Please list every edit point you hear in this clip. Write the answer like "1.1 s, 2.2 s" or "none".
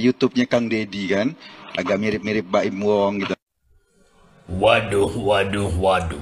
0.9 s